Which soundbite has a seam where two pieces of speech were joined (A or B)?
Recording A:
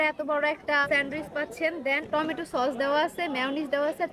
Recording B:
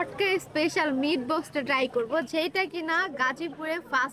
A